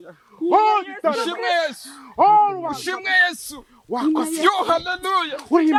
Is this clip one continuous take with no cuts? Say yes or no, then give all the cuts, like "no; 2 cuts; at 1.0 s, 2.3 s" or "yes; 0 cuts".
yes; 0 cuts